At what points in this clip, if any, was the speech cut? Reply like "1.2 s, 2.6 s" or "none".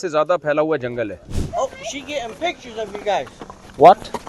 1.3 s